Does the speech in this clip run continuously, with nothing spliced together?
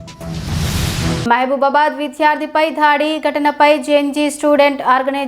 no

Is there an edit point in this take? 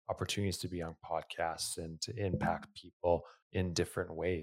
yes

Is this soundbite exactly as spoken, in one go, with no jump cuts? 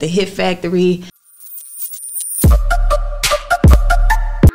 no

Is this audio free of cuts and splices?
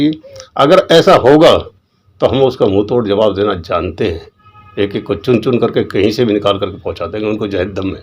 yes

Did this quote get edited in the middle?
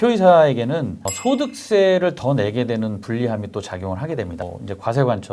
yes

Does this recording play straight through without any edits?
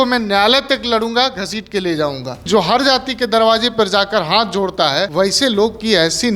no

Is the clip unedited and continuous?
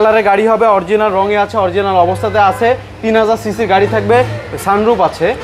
yes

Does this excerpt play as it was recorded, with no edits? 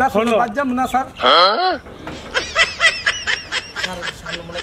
yes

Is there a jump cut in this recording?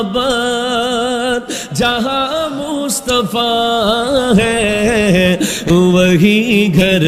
no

